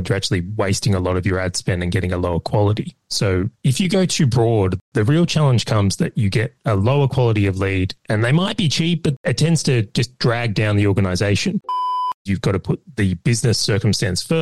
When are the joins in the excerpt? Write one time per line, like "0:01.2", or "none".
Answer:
0:03.0
0:12.1